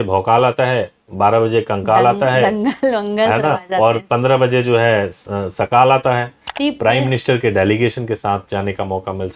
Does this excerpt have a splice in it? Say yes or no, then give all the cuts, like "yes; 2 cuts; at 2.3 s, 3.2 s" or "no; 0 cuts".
yes; 1 cut; at 6.4 s